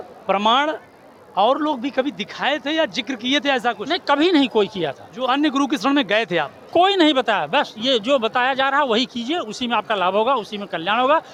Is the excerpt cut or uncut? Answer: uncut